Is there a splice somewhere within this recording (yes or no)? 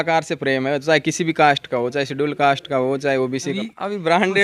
yes